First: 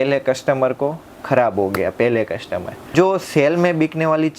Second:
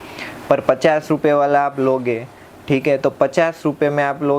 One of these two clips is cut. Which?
first; 1 cut; at 2.9 s

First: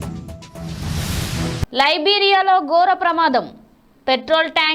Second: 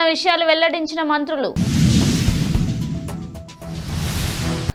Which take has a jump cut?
first; 1 cut; at 1.6 s

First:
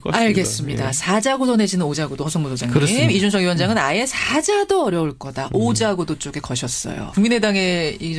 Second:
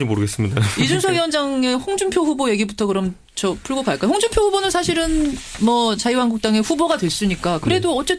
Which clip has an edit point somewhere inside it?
second; 1 cut; at 6.1 s

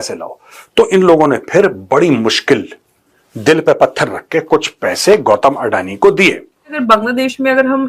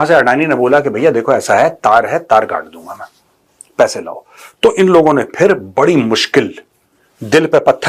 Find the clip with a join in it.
first; 1 cut; at 6.7 s

